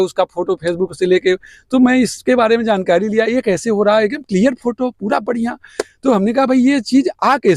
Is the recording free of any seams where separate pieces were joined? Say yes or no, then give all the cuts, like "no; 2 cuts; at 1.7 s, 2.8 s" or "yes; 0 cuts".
yes; 0 cuts